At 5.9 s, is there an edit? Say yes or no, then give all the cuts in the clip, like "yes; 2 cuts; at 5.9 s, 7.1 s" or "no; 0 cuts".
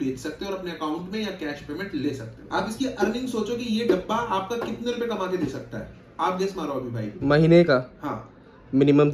no; 1 cut; at 2.3 s